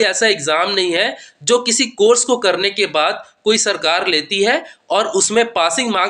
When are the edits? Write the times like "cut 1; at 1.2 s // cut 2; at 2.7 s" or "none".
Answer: none